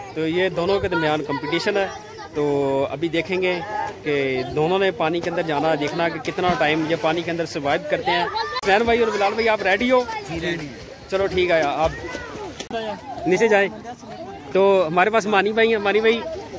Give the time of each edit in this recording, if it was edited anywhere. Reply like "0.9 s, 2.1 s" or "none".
none